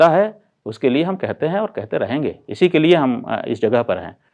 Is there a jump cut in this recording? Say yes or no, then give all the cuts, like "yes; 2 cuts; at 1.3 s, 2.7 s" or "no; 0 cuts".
no; 0 cuts